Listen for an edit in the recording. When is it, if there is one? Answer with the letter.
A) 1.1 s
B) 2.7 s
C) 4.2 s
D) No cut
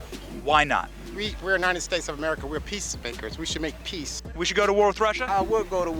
C